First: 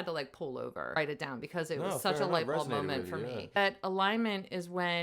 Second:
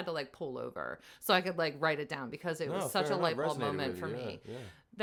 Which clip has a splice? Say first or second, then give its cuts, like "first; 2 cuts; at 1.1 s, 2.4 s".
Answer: first; 2 cuts; at 1.0 s, 3.6 s